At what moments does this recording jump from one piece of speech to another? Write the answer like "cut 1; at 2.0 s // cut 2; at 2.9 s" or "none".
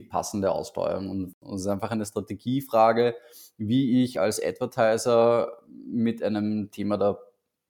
cut 1; at 1.3 s

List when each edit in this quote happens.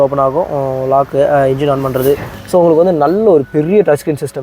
cut 1; at 2.3 s

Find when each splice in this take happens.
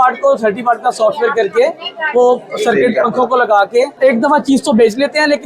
cut 1; at 3.9 s

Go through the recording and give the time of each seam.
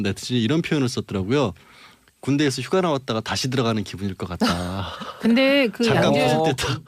cut 1; at 2.4 s

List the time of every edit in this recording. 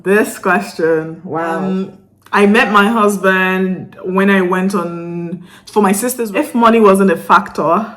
cut 1; at 1.6 s // cut 2; at 6.2 s

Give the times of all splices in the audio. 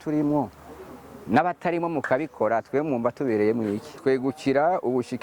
cut 1; at 3.9 s

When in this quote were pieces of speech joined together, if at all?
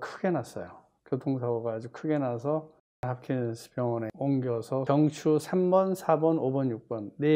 cut 1; at 4.8 s

